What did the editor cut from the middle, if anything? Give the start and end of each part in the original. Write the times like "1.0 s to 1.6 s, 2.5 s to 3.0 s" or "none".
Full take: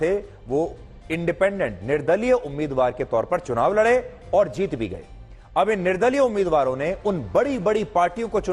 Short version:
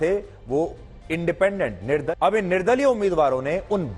2.1 s to 5.4 s